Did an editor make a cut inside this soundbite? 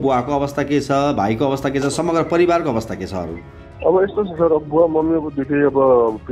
no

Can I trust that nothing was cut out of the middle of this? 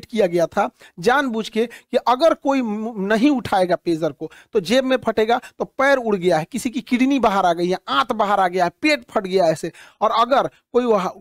yes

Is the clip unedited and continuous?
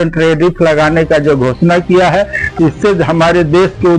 yes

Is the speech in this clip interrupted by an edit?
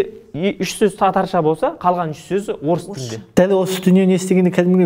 yes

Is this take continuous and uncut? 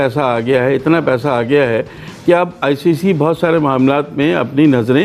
yes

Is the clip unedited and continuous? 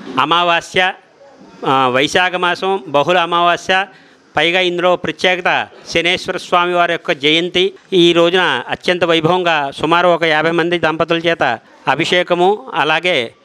no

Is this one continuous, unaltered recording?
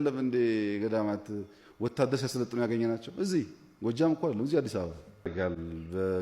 no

